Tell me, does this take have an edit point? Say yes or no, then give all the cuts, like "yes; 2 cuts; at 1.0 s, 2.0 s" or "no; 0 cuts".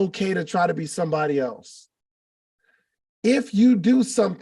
no; 0 cuts